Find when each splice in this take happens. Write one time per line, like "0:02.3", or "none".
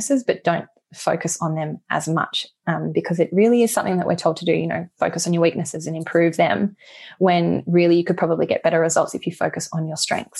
none